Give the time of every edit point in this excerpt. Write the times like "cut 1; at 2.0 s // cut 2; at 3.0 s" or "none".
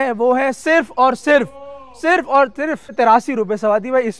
cut 1; at 2.9 s

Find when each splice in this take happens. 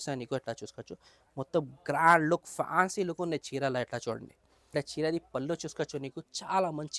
cut 1; at 4.7 s

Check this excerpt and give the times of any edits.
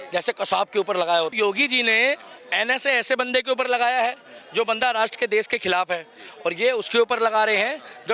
cut 1; at 1.3 s

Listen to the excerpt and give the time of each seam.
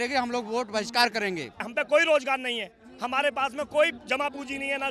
cut 1; at 1.6 s

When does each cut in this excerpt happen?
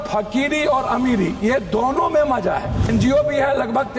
cut 1; at 2.9 s

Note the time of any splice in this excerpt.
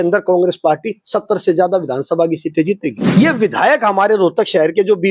cut 1; at 2.9 s

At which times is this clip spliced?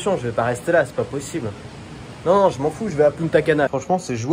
none

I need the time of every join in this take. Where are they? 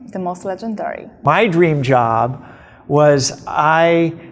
cut 1; at 1.1 s

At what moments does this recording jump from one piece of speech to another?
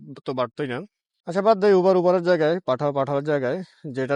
none

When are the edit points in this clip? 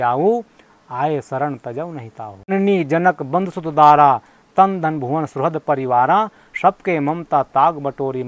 cut 1; at 2.5 s

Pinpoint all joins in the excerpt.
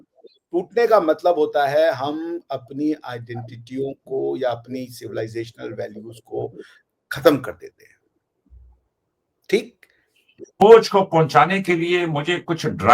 cut 1; at 10.6 s

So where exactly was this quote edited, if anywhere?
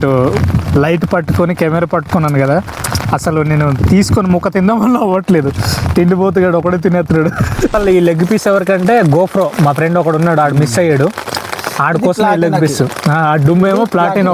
cut 1; at 7.7 s

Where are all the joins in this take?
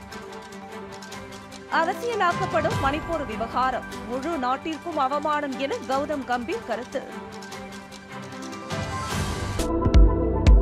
cut 1; at 9.6 s

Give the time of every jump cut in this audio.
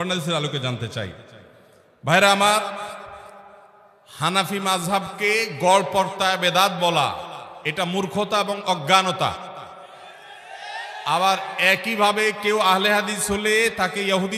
none

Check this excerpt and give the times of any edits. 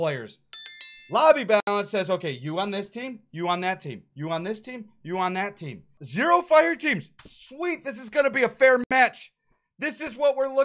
cut 1; at 6.0 s

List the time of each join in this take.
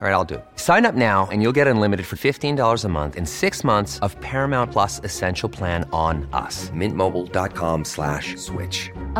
none

